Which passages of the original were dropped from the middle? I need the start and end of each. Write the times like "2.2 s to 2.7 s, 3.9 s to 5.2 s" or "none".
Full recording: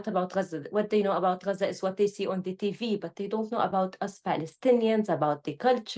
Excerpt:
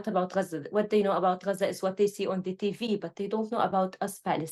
none